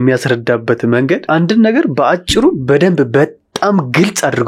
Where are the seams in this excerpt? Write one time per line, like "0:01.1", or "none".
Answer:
0:01.2